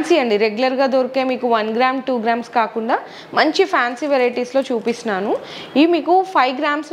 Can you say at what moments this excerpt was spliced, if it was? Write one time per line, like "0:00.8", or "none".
none